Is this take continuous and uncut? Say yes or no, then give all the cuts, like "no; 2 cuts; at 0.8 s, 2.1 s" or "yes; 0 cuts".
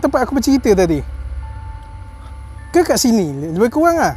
no; 2 cuts; at 1.4 s, 2.7 s